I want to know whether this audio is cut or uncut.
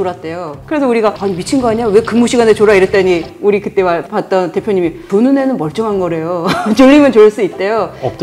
uncut